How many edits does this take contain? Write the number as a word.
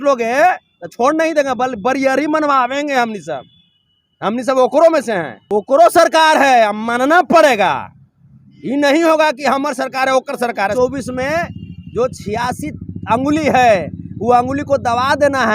two